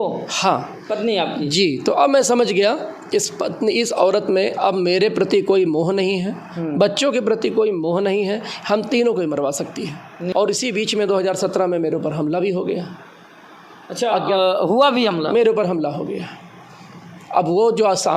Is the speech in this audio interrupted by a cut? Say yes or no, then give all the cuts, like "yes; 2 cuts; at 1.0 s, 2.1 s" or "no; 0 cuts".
yes; 1 cut; at 10.1 s